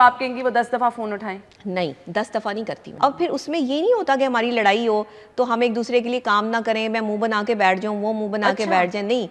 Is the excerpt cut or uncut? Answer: cut